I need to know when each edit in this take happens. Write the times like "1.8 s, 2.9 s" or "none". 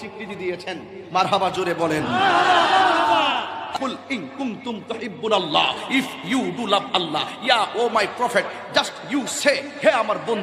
3.7 s